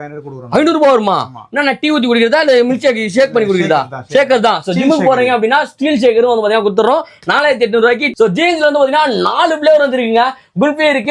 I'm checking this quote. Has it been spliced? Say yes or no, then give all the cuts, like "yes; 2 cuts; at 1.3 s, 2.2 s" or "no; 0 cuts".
no; 0 cuts